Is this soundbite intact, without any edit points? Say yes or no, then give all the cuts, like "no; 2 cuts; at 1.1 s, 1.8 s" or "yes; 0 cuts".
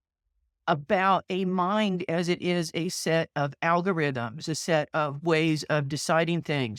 yes; 0 cuts